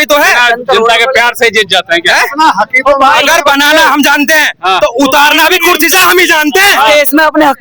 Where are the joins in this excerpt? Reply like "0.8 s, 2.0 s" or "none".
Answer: none